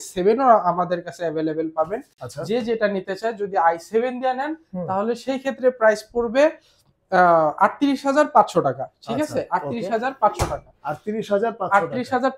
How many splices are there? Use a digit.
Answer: 0